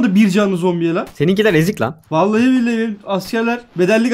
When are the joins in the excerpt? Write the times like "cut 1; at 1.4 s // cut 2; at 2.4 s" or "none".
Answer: cut 1; at 1.1 s